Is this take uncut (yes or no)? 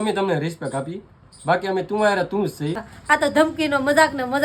no